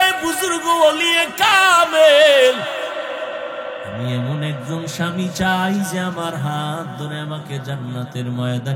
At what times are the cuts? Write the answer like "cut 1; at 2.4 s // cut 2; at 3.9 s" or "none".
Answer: cut 1; at 4.0 s